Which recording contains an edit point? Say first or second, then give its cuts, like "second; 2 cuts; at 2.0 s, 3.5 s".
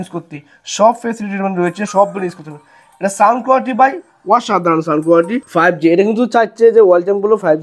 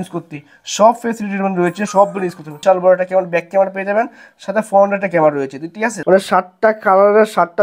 second; 2 cuts; at 2.6 s, 6.0 s